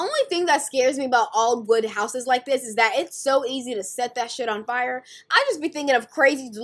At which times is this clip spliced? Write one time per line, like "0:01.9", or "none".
none